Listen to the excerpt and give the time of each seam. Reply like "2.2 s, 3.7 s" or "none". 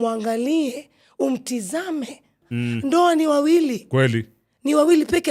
2.5 s

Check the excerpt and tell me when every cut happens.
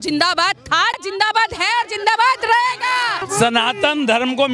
1.0 s, 3.3 s

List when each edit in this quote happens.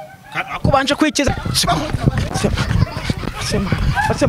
1.3 s

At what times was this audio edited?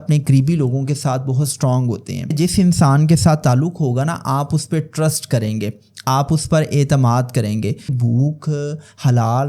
2.3 s, 7.9 s

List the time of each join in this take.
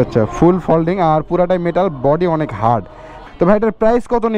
3.1 s

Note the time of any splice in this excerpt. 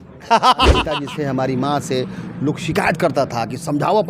0.9 s

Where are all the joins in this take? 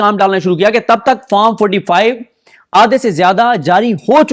none

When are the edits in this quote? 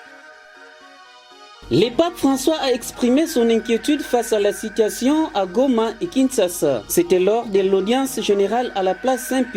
1.1 s

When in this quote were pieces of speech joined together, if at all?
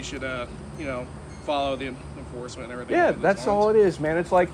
none

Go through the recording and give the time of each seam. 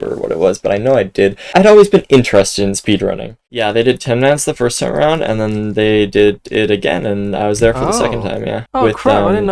3.3 s, 8.6 s

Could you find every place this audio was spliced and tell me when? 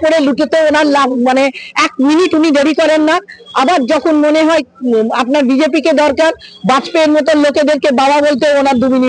none

